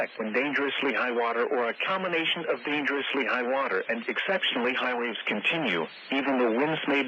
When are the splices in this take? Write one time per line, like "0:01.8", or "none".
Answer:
none